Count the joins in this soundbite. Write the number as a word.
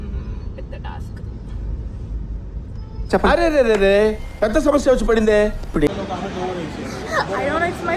one